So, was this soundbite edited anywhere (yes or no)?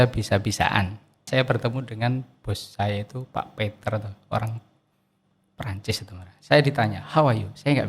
yes